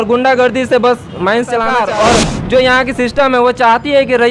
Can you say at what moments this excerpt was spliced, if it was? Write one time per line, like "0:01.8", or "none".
0:01.7